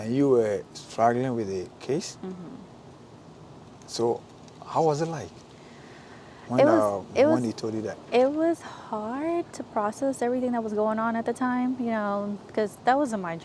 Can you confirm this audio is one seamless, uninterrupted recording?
yes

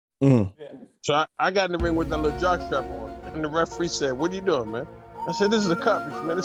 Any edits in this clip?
no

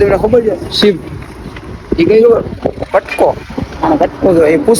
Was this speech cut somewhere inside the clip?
no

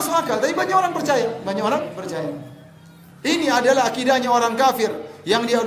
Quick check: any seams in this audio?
no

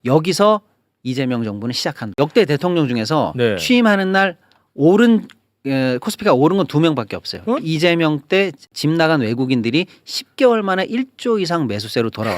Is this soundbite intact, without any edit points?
no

